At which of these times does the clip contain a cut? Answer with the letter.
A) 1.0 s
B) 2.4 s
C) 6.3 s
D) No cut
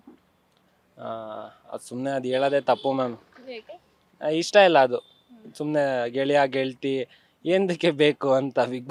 D